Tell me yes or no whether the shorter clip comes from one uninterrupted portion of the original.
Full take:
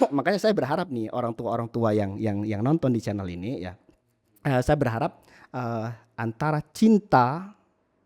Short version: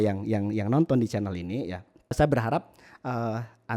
no